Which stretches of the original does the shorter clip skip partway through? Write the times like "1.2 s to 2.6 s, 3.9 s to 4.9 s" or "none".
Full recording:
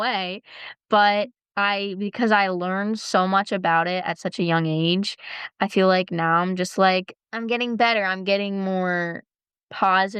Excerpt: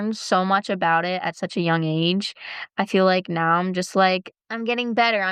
none